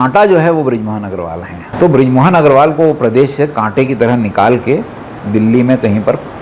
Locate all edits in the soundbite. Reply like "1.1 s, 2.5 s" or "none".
1.6 s